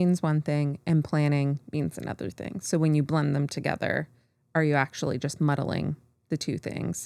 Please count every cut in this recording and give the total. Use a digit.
0